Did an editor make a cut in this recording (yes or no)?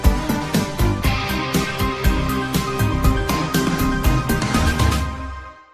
yes